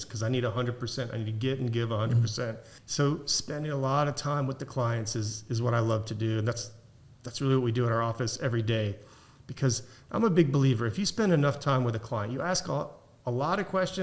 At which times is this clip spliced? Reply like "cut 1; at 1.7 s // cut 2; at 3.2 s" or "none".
cut 1; at 2.7 s